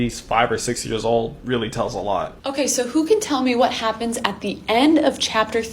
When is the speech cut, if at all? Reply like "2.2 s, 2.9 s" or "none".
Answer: 2.3 s